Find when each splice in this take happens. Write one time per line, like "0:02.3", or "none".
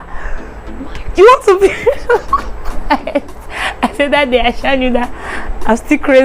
none

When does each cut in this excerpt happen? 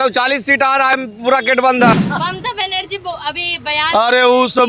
0:01.9

